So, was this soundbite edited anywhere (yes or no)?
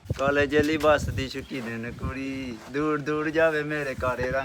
no